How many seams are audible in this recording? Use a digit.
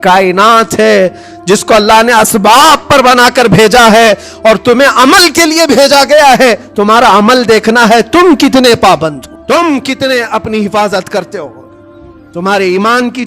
1